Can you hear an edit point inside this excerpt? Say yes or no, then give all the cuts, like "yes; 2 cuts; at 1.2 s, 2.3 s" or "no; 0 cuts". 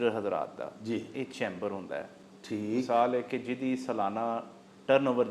no; 0 cuts